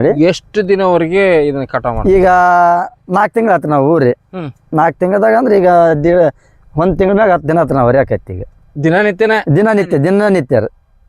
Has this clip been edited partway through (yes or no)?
no